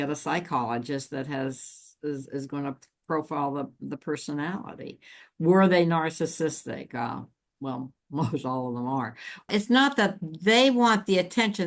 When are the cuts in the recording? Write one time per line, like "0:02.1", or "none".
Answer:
0:09.5